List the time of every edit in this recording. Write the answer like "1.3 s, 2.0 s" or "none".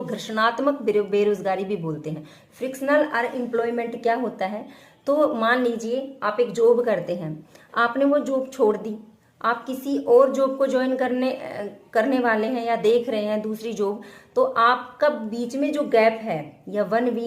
13.7 s